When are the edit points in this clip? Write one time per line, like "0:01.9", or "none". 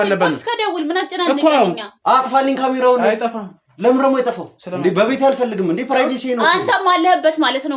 0:01.9